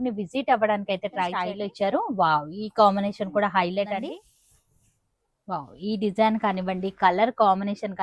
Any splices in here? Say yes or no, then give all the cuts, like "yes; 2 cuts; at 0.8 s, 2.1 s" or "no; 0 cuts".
yes; 2 cuts; at 1.5 s, 4.1 s